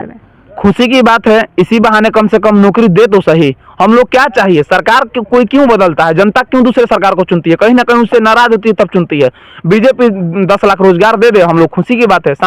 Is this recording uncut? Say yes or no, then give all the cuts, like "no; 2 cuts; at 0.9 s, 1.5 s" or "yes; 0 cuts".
yes; 0 cuts